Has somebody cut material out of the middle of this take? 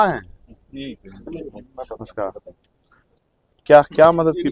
no; 0 cuts

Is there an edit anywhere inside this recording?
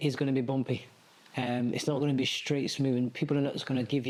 no; 0 cuts

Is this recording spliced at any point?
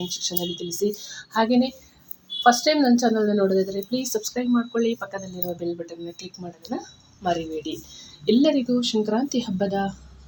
no; 0 cuts

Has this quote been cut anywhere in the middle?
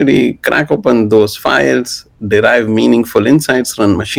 no; 0 cuts

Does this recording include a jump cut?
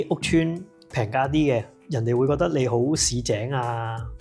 yes; 1 cut; at 1.7 s

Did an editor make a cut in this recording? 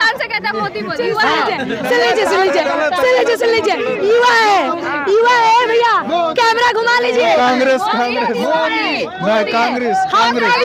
no; 0 cuts

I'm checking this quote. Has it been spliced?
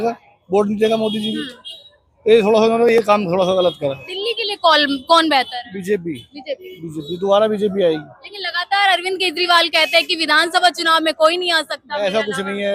no; 0 cuts

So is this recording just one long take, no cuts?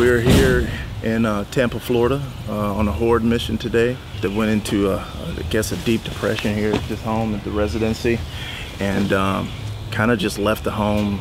yes; 0 cuts

